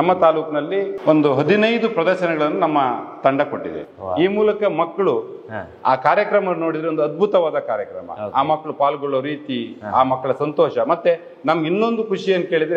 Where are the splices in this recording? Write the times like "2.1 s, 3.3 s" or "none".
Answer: none